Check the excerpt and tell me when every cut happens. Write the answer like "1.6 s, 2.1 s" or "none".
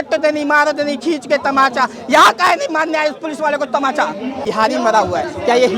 4.4 s